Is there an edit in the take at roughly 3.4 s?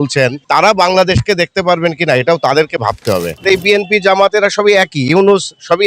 yes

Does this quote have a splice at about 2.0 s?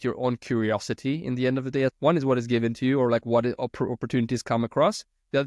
yes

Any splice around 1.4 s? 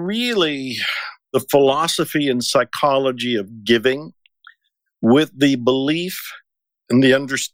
yes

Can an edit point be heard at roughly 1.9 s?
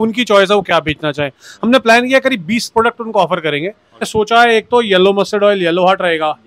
no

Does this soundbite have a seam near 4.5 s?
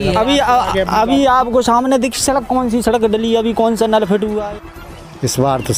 yes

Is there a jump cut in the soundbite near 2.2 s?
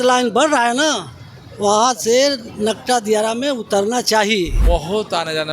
no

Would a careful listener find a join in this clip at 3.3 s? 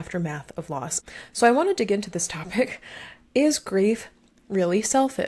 no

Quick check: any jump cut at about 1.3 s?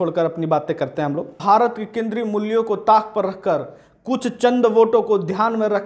yes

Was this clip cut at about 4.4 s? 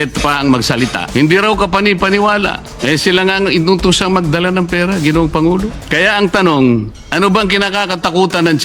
no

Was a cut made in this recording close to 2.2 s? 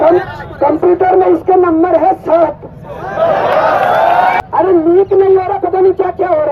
no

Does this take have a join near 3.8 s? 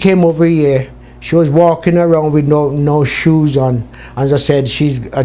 no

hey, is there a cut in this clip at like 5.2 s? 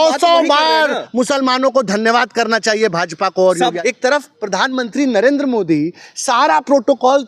no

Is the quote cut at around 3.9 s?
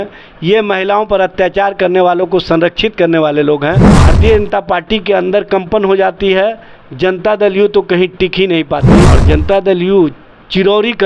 yes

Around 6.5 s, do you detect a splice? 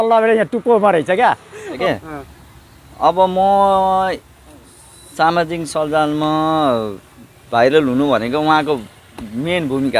no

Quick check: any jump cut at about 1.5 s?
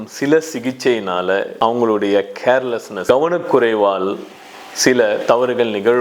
yes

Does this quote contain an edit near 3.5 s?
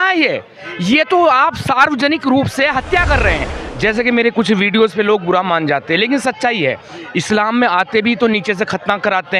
yes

